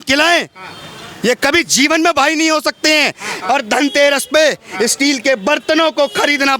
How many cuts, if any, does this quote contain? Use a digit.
1